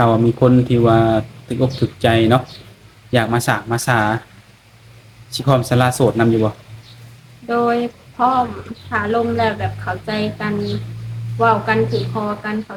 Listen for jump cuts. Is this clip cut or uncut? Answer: uncut